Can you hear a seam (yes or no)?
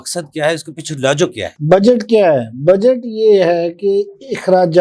no